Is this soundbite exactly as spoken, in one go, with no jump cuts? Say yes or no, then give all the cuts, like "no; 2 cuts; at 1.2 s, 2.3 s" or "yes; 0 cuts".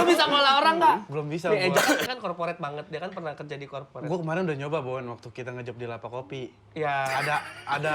no; 2 cuts; at 1.1 s, 2.1 s